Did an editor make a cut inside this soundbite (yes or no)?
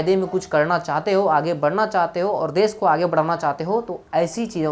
no